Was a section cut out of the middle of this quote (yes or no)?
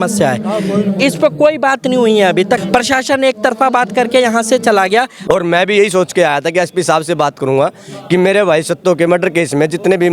yes